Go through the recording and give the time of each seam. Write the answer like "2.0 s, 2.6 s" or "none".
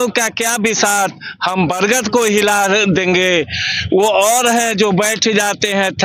none